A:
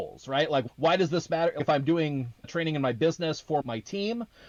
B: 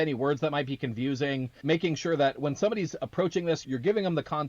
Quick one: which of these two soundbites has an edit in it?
B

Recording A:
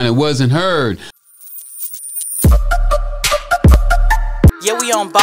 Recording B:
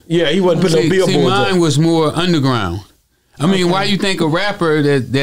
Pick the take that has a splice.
A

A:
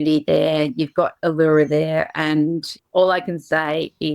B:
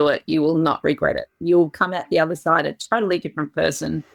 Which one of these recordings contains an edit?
A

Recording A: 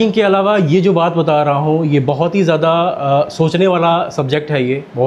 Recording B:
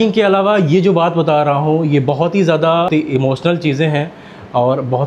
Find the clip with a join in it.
B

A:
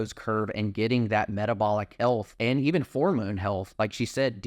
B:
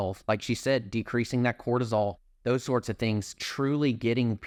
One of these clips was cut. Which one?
A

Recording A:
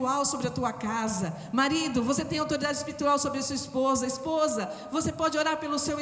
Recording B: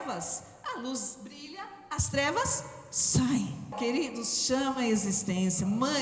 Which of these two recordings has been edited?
B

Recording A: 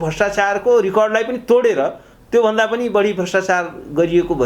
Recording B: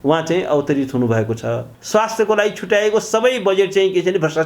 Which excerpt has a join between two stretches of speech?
B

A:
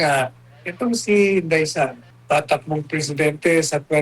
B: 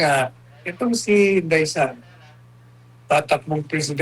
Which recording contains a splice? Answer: A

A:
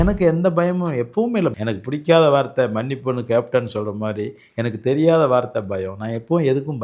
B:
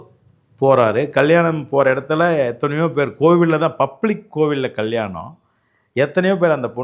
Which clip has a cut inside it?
A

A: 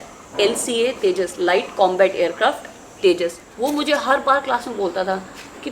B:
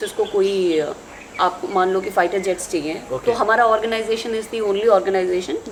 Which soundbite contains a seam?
A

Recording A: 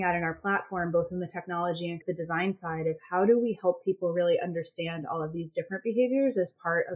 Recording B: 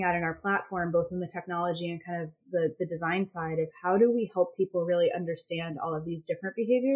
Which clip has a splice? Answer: A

